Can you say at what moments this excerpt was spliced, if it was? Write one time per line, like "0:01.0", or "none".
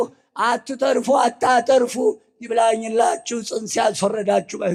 none